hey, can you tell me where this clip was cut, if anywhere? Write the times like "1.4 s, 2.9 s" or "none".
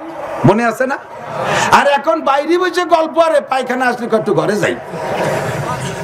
none